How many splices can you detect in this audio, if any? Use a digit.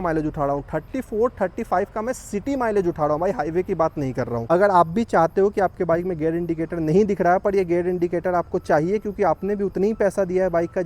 1